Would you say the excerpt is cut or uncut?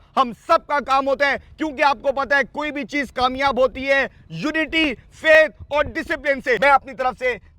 cut